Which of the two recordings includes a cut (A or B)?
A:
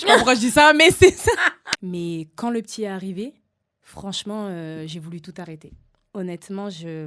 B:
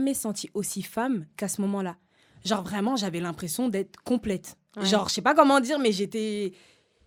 A